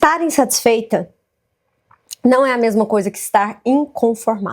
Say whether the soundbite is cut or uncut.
uncut